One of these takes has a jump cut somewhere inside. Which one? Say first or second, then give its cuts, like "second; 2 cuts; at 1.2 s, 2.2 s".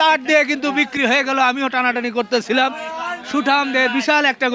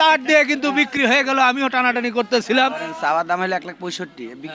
second; 1 cut; at 2.9 s